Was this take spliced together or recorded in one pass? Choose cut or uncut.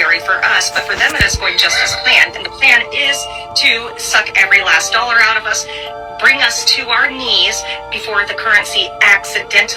uncut